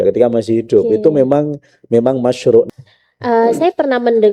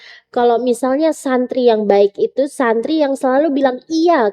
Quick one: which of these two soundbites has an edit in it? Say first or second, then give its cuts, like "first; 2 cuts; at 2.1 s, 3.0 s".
first; 1 cut; at 2.7 s